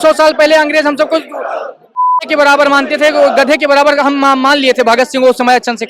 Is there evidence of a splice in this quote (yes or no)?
no